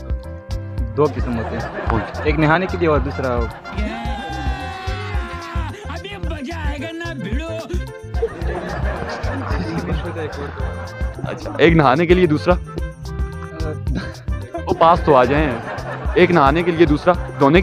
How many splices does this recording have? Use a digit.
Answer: 0